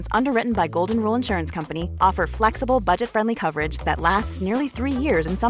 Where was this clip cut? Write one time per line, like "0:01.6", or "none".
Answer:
none